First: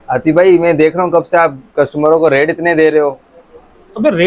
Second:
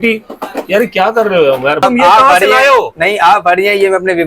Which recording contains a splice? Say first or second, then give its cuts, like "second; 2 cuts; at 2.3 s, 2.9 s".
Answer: second; 1 cut; at 1.8 s